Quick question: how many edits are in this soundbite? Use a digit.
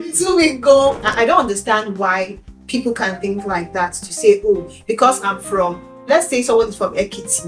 1